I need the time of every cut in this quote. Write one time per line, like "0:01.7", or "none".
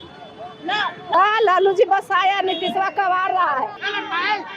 0:01.1